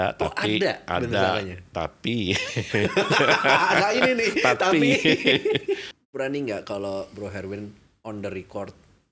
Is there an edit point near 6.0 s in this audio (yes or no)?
yes